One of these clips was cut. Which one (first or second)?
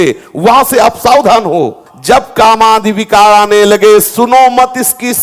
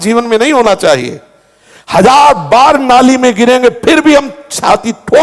first